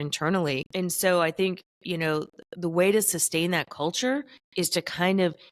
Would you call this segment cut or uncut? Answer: uncut